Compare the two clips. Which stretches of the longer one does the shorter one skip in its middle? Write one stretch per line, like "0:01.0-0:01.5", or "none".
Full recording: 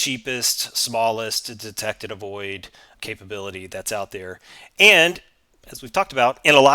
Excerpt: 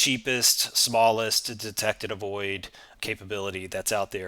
none